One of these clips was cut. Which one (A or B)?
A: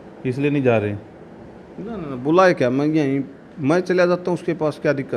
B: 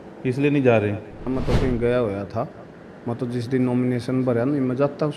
B